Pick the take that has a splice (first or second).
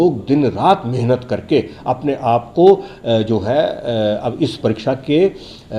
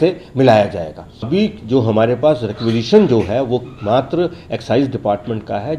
second